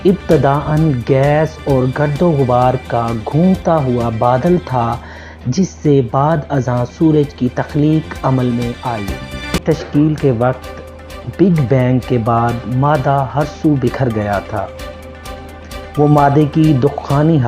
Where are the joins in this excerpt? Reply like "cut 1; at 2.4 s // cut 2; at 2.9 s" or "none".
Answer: cut 1; at 9.6 s